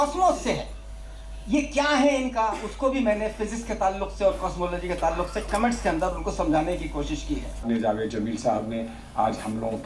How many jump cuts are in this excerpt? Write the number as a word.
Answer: one